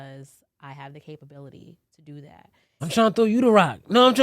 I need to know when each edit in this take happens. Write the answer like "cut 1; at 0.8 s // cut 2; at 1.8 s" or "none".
cut 1; at 2.7 s